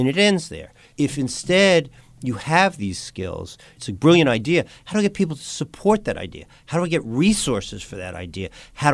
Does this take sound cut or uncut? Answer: cut